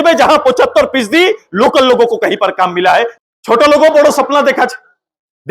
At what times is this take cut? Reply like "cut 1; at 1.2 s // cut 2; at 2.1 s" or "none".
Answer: cut 1; at 3.1 s